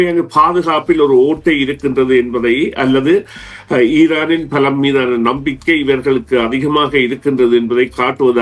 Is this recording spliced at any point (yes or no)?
no